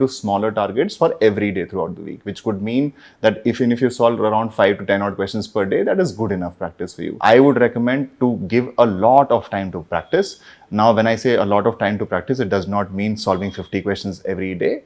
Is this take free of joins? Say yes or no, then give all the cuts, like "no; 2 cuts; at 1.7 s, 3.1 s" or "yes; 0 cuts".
no; 1 cut; at 7.1 s